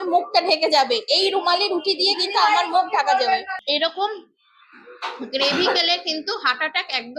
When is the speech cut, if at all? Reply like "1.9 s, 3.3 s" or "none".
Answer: 3.5 s